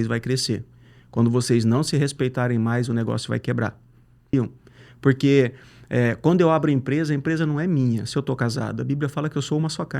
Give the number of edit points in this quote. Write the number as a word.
one